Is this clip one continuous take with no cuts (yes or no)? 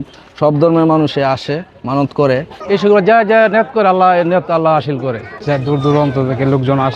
no